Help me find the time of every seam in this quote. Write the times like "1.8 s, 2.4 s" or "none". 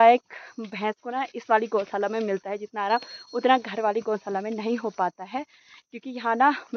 none